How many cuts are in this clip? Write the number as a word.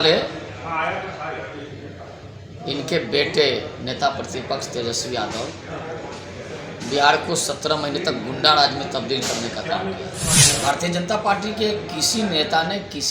one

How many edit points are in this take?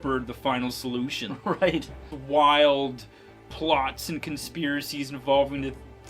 one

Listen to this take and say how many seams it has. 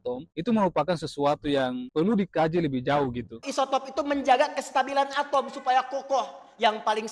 one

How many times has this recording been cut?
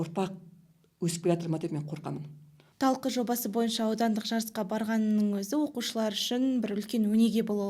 one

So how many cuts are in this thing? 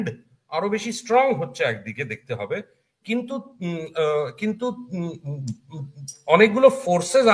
zero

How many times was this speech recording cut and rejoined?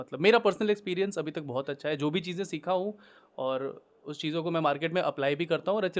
zero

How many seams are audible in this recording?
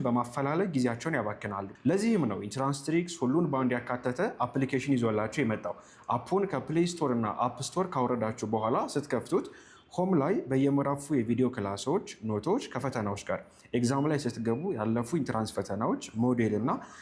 zero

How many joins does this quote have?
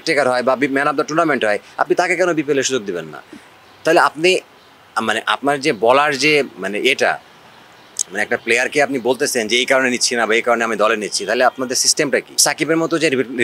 one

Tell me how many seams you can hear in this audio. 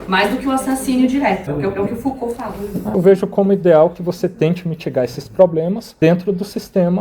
three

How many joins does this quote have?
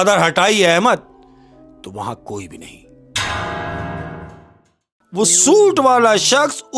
one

